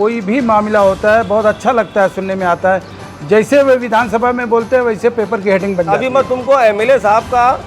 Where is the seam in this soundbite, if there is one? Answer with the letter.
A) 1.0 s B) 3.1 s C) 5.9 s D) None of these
C